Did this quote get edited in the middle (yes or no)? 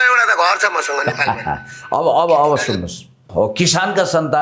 yes